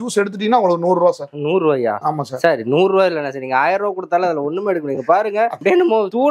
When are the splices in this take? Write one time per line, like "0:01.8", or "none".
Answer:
none